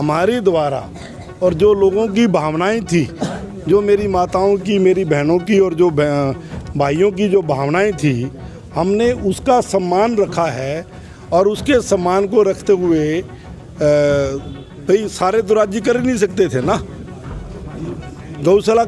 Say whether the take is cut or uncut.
uncut